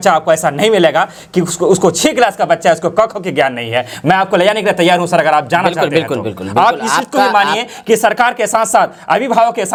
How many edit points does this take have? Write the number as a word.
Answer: zero